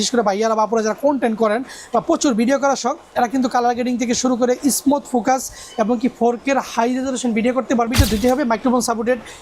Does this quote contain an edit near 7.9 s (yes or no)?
yes